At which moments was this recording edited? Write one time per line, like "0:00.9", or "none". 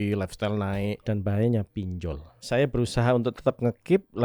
0:01.0
0:02.3